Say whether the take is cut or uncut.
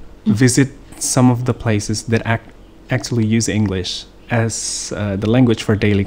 uncut